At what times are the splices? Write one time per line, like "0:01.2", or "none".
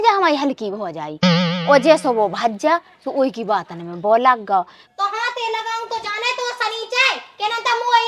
0:04.8